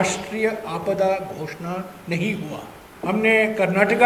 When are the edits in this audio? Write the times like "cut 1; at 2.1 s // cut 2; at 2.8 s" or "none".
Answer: cut 1; at 2.8 s